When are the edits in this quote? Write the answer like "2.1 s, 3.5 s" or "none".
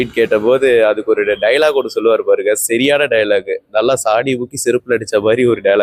none